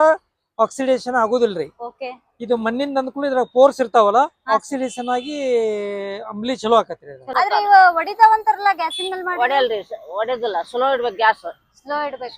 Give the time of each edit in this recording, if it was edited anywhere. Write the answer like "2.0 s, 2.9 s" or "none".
7.3 s